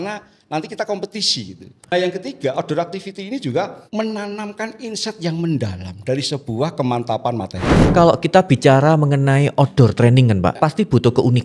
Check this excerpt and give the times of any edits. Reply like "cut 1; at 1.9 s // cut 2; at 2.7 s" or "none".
cut 1; at 1.9 s // cut 2; at 3.8 s // cut 3; at 7.9 s // cut 4; at 10.6 s